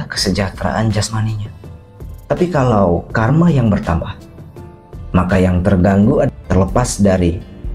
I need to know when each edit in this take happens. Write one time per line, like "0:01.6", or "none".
0:06.3